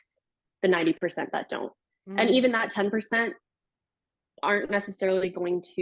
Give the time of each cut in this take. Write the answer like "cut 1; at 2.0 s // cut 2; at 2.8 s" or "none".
none